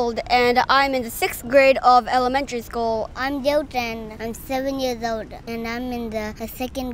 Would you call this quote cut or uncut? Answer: cut